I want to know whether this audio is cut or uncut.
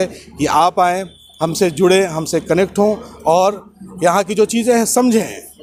uncut